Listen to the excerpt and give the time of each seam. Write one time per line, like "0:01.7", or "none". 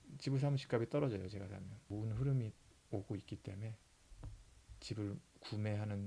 0:01.8